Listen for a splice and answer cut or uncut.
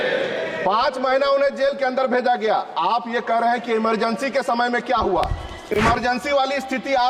uncut